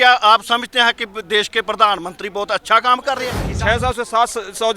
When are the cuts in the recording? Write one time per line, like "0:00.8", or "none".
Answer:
0:03.4